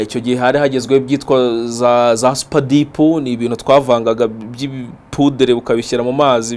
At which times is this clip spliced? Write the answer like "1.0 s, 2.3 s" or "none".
none